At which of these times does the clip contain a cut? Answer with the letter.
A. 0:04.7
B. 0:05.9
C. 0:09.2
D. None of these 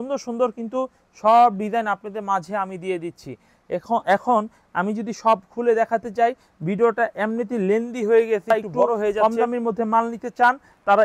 C